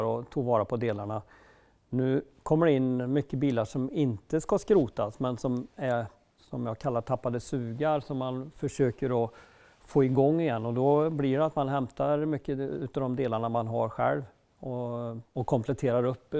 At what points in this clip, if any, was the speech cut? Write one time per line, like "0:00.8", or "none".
0:15.2